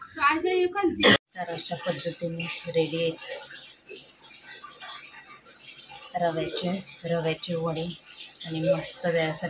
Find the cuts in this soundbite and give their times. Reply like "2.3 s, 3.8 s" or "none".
1.2 s